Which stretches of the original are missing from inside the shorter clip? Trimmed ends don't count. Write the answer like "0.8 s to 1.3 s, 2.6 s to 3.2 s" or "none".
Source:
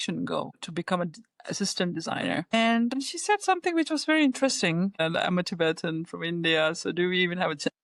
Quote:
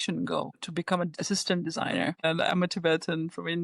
1.2 s to 1.5 s, 2.5 s to 4.9 s